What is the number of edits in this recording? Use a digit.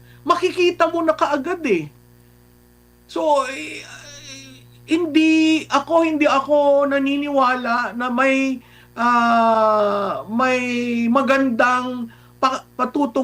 0